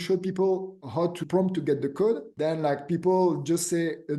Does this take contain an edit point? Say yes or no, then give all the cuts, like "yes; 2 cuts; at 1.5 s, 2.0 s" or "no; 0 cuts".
yes; 2 cuts; at 1.2 s, 2.3 s